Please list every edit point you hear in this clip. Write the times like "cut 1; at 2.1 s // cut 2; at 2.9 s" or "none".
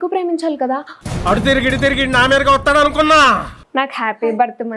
cut 1; at 3.5 s